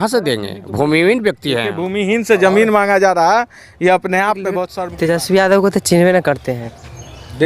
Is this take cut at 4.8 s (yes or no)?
yes